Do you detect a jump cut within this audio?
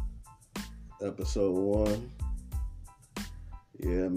yes; 1 cut; at 1.0 s

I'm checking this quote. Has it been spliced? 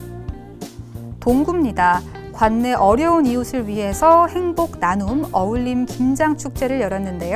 yes; 1 cut; at 1.2 s

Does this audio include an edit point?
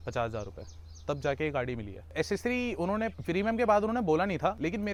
no; 0 cuts

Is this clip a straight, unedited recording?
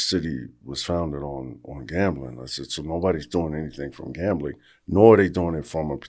yes; 0 cuts

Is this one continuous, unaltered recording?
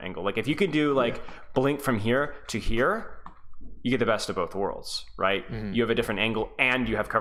yes; 0 cuts

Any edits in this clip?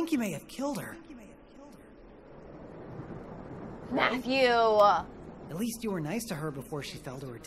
no; 0 cuts

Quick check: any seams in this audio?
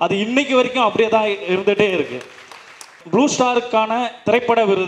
yes; 1 cut; at 2.9 s

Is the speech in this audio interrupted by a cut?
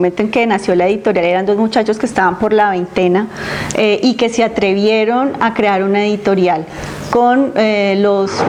no; 0 cuts

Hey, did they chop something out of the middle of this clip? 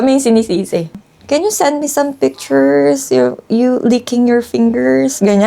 yes; 1 cut; at 1.0 s

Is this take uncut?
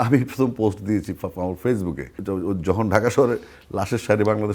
no; 1 cut; at 2.1 s

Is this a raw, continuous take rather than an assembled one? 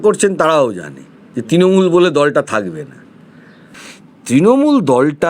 no; 1 cut; at 3.7 s

